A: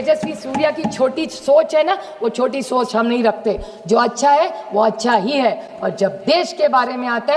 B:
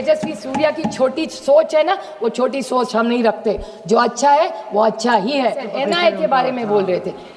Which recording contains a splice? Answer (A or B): B